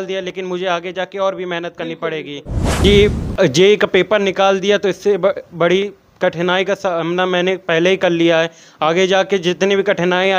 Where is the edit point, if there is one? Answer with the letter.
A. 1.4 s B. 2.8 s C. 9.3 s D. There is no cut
B